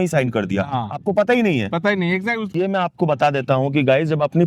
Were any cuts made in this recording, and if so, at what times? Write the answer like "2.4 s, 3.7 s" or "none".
2.5 s